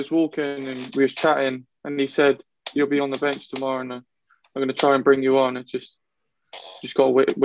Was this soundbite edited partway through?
no; 0 cuts

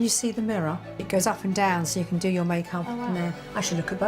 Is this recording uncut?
no; 1 cut; at 1.0 s

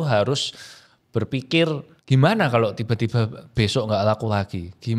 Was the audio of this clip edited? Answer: yes; 1 cut; at 1.9 s

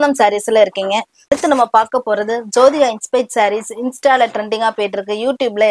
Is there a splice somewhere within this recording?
yes; 1 cut; at 1.1 s

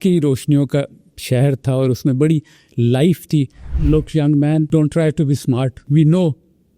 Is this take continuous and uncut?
no; 3 cuts; at 3.6 s, 4.7 s, 5.8 s

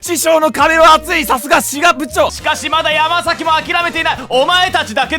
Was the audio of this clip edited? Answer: yes; 1 cut; at 2.4 s

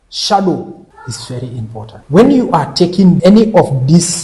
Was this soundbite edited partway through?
yes; 3 cuts; at 0.9 s, 2.0 s, 3.2 s

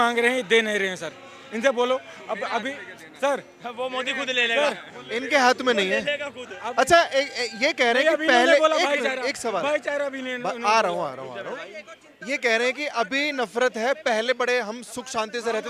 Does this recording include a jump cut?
no; 0 cuts

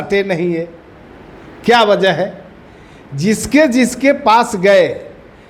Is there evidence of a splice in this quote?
no; 0 cuts

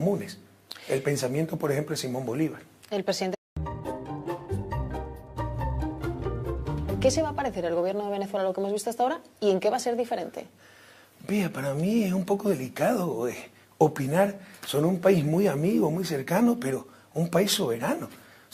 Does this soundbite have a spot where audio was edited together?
no; 0 cuts

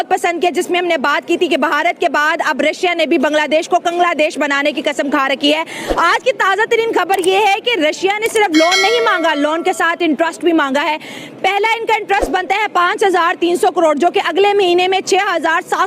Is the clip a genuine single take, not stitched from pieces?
yes; 0 cuts

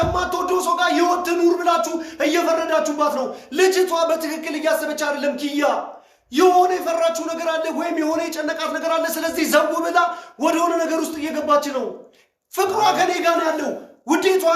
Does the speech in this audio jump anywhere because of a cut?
no; 0 cuts

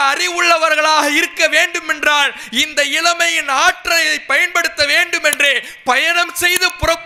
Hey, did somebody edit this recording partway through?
no; 0 cuts

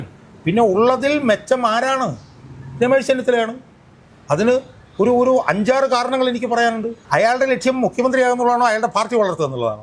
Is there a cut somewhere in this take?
yes; 1 cut; at 7.0 s

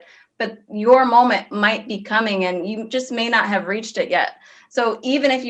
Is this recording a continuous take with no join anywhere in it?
yes; 0 cuts

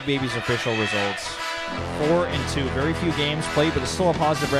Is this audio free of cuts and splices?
no; 1 cut; at 1.9 s

